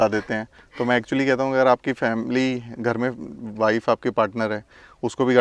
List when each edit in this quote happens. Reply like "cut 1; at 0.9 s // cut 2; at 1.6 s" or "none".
none

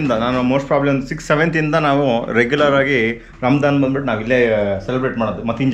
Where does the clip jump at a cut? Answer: none

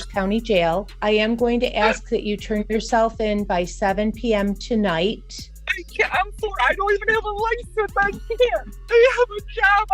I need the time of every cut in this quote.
cut 1; at 0.9 s // cut 2; at 8.7 s

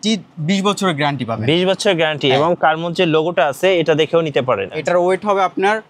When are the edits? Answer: cut 1; at 4.7 s

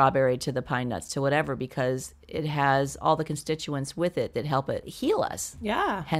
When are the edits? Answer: none

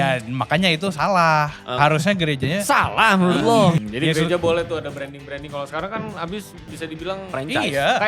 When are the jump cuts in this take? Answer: cut 1; at 3.8 s // cut 2; at 6.7 s

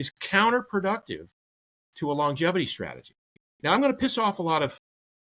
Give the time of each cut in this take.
none

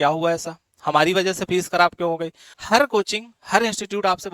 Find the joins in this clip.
cut 1; at 2.5 s

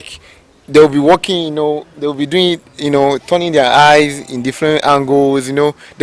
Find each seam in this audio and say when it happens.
none

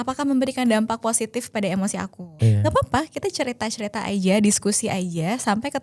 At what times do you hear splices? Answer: cut 1; at 2.4 s

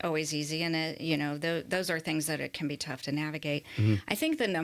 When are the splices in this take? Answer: none

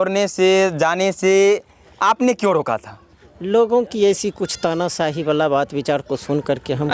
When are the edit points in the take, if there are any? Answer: none

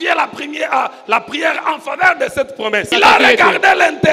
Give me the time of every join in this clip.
cut 1; at 2.9 s

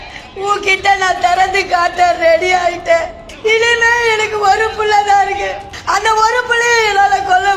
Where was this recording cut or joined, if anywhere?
cut 1; at 3.2 s // cut 2; at 5.7 s

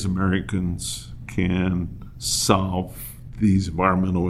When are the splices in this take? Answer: none

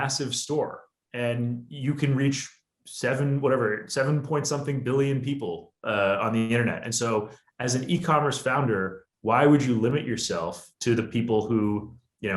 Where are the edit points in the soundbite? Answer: none

